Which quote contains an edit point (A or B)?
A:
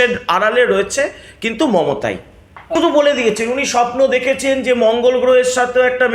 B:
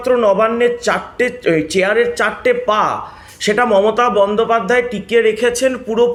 A